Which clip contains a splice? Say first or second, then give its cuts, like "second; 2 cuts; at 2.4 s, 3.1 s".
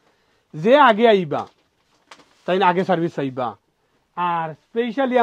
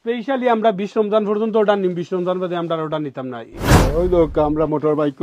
second; 1 cut; at 3.5 s